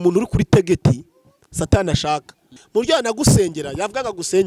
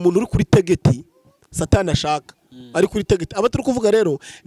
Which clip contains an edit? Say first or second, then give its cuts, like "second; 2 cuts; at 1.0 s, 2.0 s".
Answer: first; 1 cut; at 2.6 s